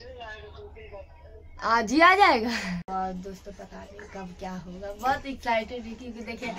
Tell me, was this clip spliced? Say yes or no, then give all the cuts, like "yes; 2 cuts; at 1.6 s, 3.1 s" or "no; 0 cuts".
yes; 1 cut; at 2.9 s